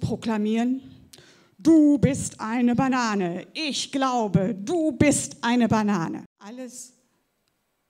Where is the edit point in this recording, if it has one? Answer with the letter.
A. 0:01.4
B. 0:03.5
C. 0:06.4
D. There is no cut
C